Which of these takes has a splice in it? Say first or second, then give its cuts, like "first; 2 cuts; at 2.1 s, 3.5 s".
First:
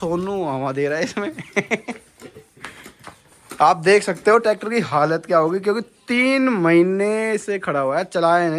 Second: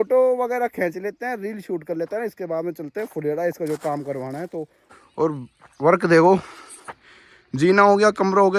second; 1 cut; at 4.8 s